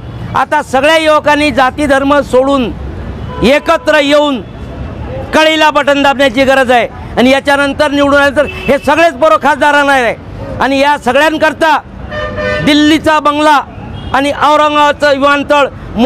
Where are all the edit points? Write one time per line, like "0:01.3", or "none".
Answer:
none